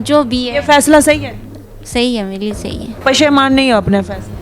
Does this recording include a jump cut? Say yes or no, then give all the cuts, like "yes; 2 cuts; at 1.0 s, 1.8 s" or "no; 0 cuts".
yes; 1 cut; at 3.0 s